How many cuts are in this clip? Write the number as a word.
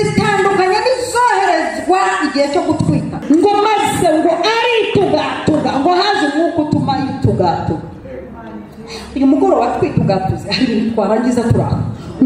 one